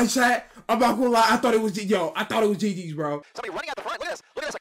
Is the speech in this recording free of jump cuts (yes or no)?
no